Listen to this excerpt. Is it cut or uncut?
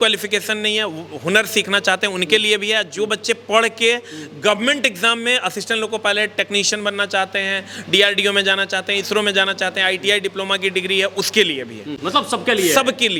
uncut